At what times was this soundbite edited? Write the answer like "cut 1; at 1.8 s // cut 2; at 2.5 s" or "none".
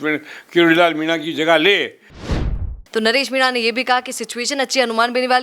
cut 1; at 2.4 s